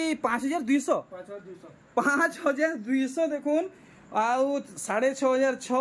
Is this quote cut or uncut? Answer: uncut